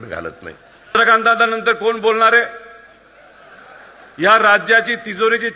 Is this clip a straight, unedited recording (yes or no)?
no